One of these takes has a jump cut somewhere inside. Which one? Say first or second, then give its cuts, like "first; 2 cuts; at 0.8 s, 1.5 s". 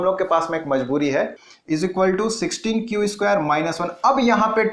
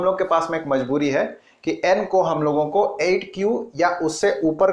first; 1 cut; at 1.5 s